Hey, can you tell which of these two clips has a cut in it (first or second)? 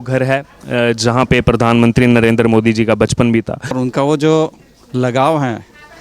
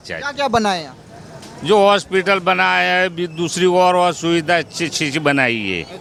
first